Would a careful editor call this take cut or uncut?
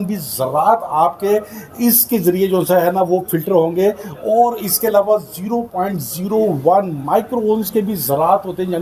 uncut